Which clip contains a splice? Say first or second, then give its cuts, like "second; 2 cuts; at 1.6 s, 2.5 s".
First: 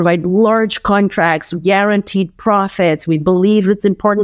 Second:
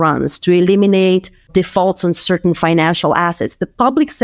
second; 1 cut; at 1.4 s